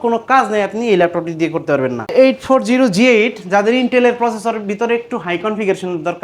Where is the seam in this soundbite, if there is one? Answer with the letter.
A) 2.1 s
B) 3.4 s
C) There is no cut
A